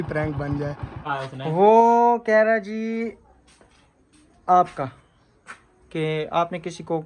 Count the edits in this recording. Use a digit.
1